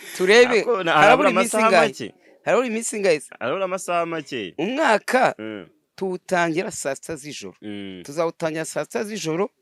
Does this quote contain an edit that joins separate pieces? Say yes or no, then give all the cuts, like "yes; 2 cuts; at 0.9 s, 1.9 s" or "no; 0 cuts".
no; 0 cuts